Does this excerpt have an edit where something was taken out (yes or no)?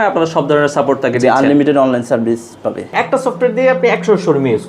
yes